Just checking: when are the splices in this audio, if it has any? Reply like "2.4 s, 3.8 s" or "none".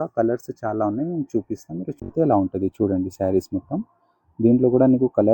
2.0 s